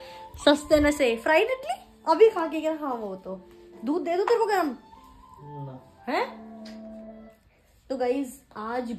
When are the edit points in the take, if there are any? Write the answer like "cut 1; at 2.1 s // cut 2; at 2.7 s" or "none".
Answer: none